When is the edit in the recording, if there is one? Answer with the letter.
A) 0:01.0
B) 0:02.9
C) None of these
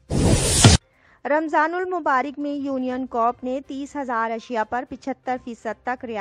A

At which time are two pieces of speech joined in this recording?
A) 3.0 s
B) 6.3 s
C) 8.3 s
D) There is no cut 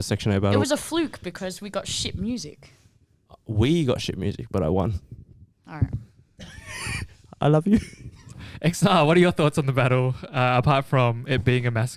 C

